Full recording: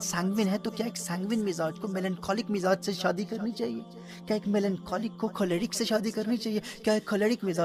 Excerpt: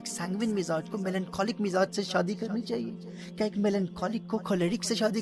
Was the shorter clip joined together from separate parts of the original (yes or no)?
no